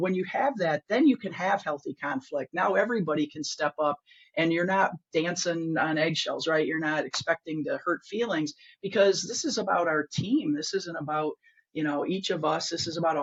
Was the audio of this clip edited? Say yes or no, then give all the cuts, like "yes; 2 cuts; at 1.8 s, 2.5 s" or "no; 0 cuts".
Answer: no; 0 cuts